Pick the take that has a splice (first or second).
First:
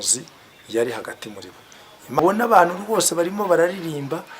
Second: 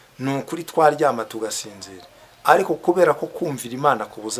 first